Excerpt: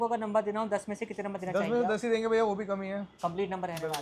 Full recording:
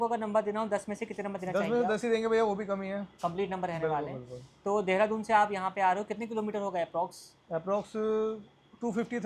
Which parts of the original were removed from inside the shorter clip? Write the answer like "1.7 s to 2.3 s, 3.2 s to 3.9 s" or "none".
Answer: none